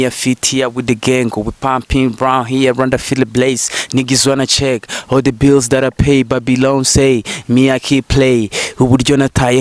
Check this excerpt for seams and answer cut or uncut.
uncut